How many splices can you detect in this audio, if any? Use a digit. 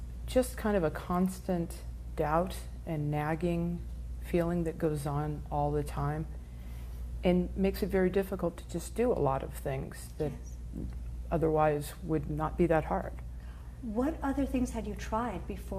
0